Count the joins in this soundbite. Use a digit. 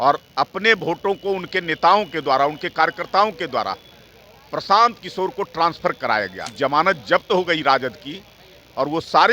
1